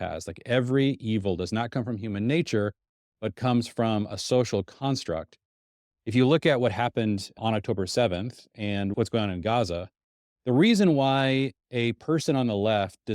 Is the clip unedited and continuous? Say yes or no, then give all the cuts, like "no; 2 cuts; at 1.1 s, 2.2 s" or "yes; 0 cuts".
yes; 0 cuts